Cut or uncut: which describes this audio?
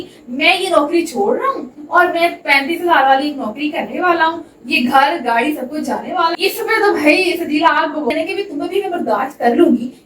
cut